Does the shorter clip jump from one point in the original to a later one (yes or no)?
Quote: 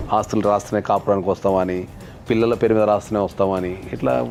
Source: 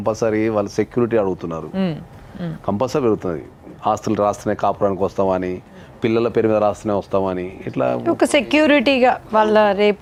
no